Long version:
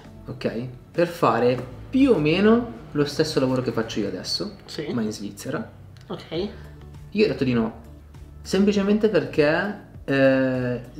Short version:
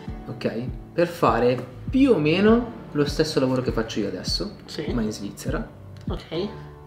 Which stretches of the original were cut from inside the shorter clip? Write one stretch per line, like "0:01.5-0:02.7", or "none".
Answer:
none